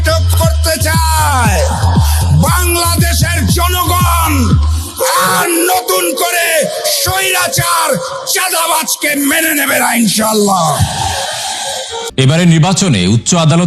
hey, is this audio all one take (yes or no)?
no